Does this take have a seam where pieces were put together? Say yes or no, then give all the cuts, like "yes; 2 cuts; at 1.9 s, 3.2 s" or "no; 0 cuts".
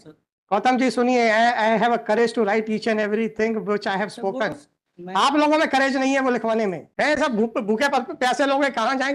yes; 1 cut; at 6.8 s